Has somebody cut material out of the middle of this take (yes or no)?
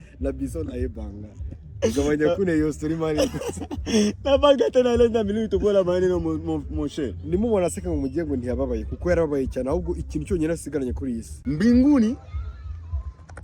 yes